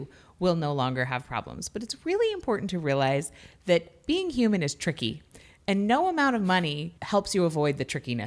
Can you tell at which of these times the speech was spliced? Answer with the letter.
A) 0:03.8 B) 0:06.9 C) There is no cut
B